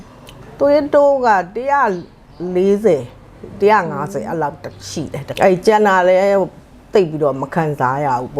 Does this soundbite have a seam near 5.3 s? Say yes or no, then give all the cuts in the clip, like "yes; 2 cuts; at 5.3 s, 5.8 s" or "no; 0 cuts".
yes; 1 cut; at 5.3 s